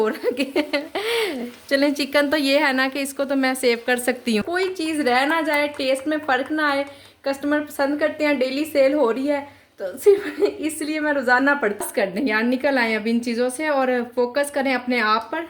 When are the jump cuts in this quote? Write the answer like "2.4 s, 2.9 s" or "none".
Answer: 4.5 s, 11.8 s